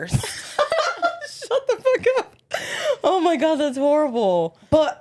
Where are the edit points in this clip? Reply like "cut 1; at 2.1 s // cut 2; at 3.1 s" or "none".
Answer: none